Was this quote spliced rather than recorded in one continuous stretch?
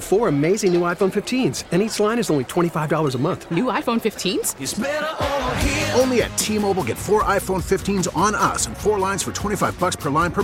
no; 0 cuts

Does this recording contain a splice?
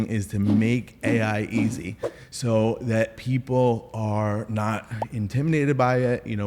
no; 0 cuts

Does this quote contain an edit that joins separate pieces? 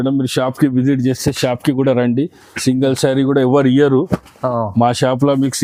no; 0 cuts

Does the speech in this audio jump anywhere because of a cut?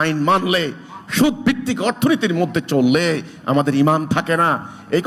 no; 0 cuts

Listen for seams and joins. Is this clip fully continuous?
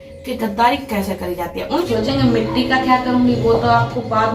no; 1 cut; at 1.9 s

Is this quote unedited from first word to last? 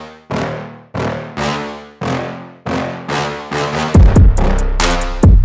yes; 0 cuts

